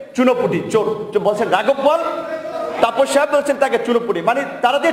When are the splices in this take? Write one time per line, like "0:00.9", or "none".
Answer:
none